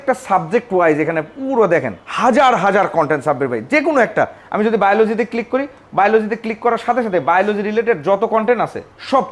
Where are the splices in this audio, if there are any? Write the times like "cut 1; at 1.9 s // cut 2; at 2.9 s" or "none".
none